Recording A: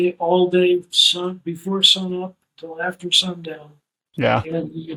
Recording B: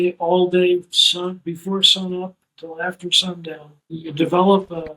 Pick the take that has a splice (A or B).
B